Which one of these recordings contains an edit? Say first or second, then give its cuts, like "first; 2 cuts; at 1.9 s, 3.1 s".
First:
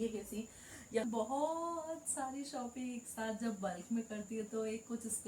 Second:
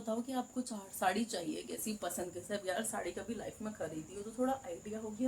first; 1 cut; at 1.0 s